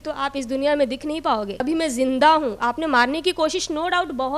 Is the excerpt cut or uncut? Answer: cut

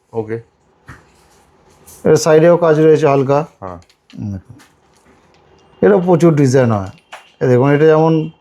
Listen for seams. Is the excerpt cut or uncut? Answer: uncut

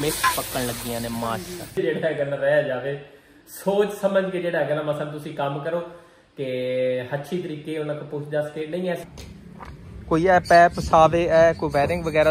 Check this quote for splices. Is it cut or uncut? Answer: cut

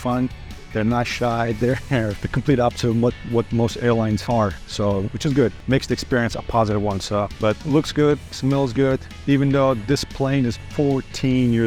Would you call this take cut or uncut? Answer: uncut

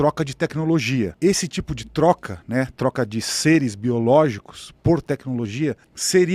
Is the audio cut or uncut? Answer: cut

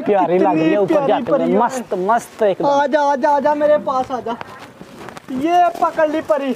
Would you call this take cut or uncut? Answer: uncut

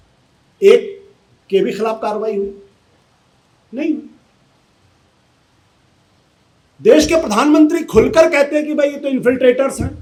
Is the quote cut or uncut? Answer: uncut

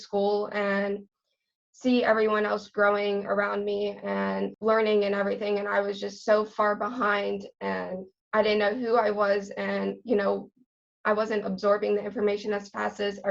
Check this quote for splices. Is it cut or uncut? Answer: uncut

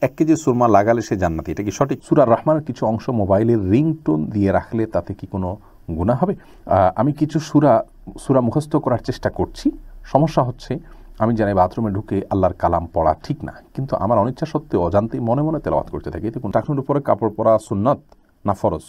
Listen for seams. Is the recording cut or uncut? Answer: cut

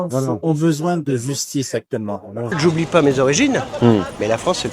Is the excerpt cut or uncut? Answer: cut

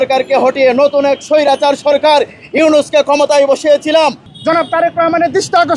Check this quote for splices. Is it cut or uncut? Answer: cut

